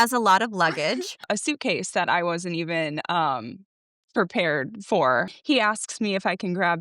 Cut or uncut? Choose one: cut